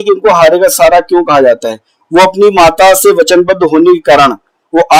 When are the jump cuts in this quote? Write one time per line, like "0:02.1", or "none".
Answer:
none